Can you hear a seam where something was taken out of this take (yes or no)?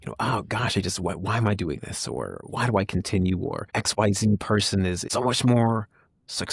yes